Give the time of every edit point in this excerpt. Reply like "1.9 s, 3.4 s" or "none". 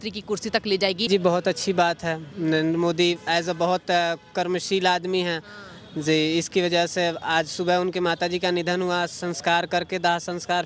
1.1 s